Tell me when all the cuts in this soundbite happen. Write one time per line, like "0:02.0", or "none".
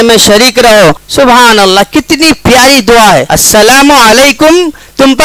0:01.0
0:03.3